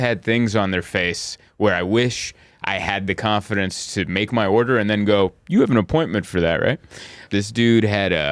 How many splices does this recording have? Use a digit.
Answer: 1